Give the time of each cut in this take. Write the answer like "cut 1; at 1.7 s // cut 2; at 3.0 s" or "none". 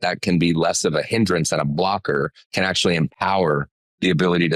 cut 1; at 2.4 s